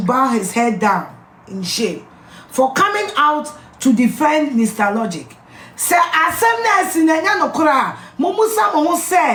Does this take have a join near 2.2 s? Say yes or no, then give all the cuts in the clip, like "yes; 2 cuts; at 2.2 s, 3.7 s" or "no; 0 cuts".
no; 0 cuts